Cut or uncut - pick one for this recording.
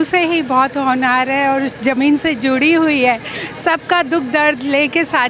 uncut